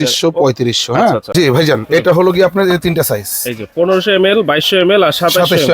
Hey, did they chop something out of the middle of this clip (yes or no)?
yes